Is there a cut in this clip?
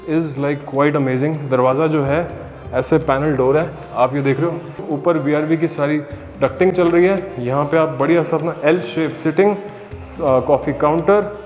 yes; 1 cut; at 4.8 s

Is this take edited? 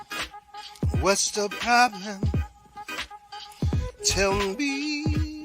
yes; 1 cut; at 0.9 s

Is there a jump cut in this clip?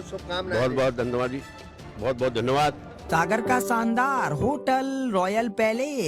yes; 1 cut; at 3.1 s

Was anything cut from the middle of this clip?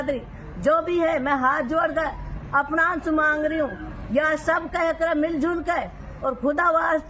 no; 0 cuts

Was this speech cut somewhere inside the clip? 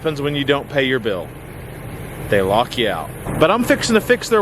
yes; 1 cut; at 3.2 s

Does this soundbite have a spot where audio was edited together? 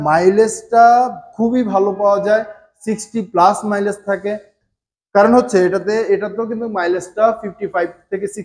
yes; 1 cut; at 4.5 s

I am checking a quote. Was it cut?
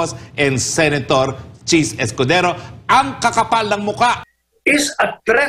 yes; 1 cut; at 4.3 s

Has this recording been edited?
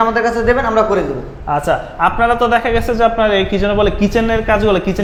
no; 0 cuts

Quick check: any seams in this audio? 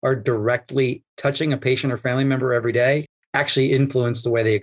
no; 0 cuts

